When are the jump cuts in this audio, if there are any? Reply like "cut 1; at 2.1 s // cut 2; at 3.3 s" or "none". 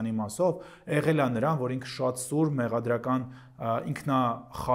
none

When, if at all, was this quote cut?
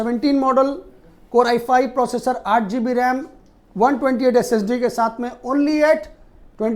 none

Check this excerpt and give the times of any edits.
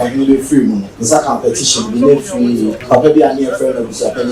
cut 1; at 0.9 s // cut 2; at 2.8 s

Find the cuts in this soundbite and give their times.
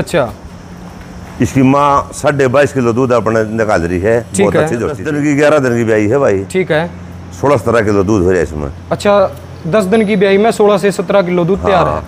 cut 1; at 5.0 s

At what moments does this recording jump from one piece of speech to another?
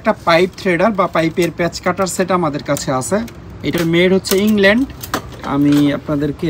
none

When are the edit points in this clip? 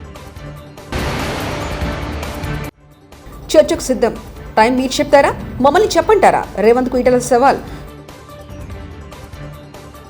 cut 1; at 0.9 s // cut 2; at 2.7 s

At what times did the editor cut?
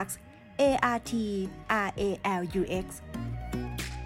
cut 1; at 3.0 s

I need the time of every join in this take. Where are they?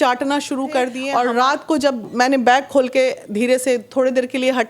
cut 1; at 1.0 s

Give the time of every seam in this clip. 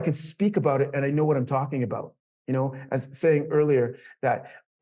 none

